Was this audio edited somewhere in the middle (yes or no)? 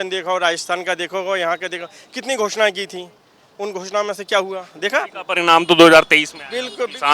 no